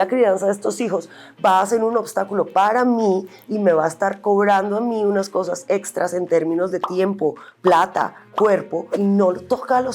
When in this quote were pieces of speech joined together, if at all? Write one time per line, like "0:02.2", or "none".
0:08.8